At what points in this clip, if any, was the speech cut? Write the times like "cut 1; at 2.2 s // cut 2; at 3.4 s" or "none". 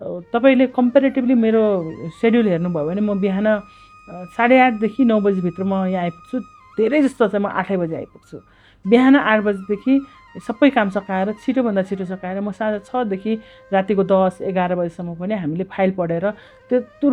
none